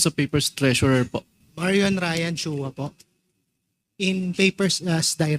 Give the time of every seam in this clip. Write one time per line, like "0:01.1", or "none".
0:01.4